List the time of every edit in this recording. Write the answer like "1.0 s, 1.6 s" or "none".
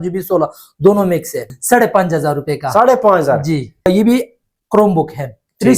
1.5 s, 3.9 s